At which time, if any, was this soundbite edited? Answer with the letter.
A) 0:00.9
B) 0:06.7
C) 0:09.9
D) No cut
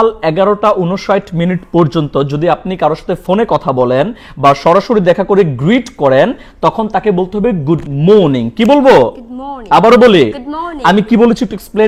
D